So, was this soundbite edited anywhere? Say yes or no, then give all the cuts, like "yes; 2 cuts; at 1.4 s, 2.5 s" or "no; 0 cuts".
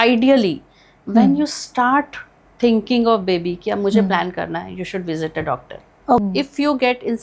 yes; 1 cut; at 6.2 s